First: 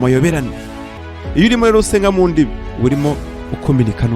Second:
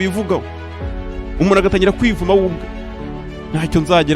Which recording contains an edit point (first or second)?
first